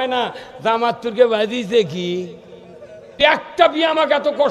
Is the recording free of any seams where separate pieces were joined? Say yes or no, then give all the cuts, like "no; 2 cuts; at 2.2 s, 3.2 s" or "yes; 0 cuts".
no; 1 cut; at 3.2 s